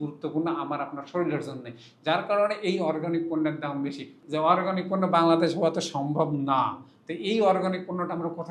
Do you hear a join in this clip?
yes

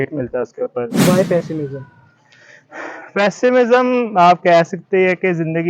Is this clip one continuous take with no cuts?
no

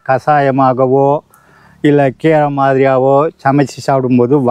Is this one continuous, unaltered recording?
yes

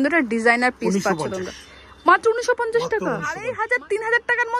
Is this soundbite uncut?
no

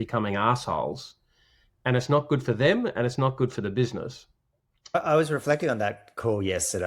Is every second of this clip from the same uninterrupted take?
no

